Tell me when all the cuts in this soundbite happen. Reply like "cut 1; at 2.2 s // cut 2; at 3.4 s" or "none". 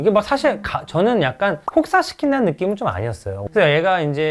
cut 1; at 3.4 s